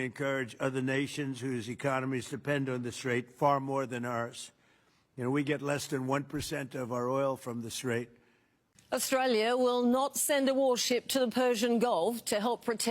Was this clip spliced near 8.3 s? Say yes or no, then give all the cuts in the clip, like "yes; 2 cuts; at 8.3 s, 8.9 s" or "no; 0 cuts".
yes; 1 cut; at 8.3 s